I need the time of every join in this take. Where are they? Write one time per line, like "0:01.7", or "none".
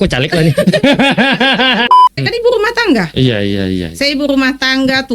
0:02.0